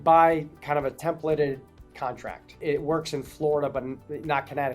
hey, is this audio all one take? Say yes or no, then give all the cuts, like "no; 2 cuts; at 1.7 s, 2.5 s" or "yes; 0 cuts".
no; 1 cut; at 2.6 s